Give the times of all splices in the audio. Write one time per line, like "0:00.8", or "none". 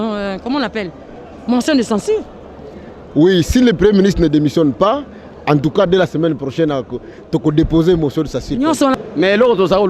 0:08.9